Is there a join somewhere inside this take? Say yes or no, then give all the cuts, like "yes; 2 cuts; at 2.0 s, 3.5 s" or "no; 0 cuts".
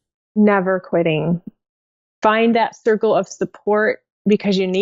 yes; 1 cut; at 1.5 s